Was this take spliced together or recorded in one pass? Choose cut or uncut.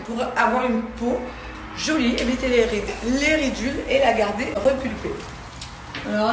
uncut